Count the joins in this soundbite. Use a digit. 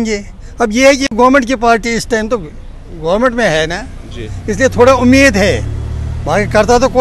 0